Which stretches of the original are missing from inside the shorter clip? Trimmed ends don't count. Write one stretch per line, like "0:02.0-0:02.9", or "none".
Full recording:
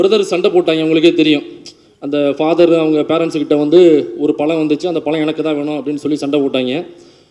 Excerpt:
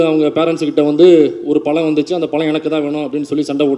none